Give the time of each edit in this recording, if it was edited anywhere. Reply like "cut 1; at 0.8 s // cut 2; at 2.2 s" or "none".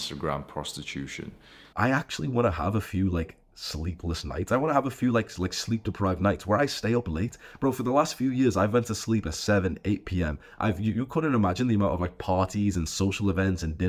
none